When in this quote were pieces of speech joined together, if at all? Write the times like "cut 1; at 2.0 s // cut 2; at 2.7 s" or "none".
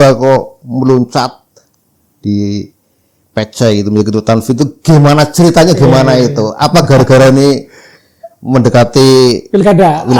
none